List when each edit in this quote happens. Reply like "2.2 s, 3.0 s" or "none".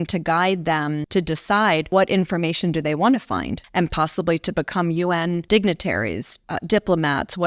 1.0 s, 1.9 s, 3.6 s, 5.4 s, 6.3 s